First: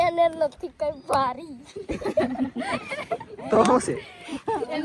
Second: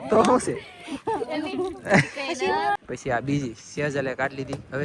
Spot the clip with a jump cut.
second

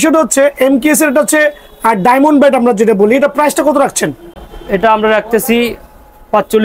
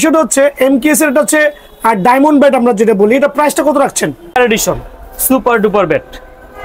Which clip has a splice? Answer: second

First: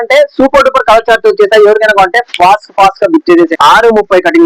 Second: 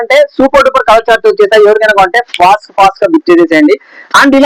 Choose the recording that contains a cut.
first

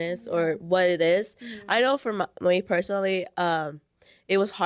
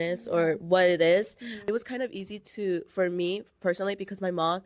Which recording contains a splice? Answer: second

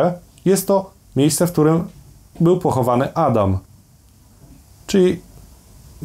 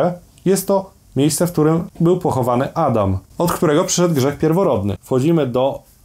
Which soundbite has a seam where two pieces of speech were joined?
second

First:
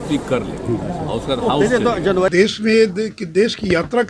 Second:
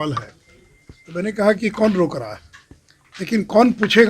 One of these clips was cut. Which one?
first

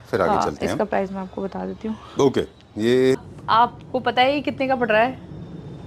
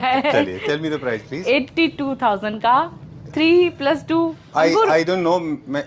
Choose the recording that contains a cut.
first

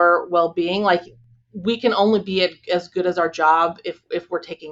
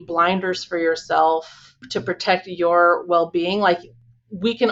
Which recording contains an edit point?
second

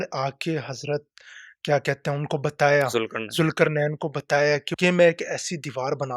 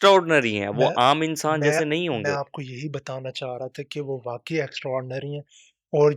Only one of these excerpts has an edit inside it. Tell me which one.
first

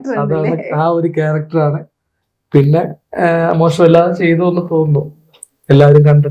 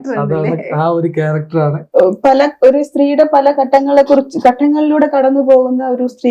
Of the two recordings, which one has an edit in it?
second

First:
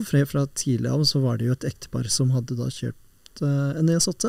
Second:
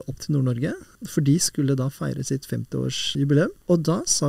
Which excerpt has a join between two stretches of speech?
second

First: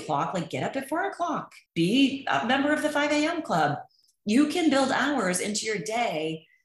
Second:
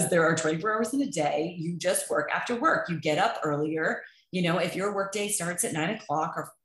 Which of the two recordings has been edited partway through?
first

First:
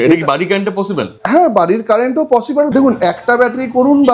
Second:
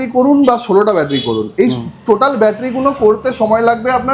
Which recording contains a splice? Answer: first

